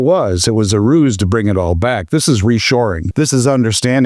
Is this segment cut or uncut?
cut